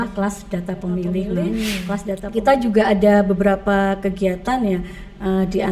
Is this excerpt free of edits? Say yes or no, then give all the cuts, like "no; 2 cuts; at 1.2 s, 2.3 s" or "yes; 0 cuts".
no; 1 cut; at 2.2 s